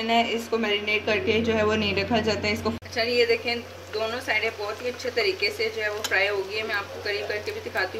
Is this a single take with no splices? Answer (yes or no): no